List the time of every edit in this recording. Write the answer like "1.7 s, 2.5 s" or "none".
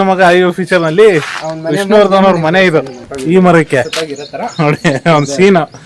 3.0 s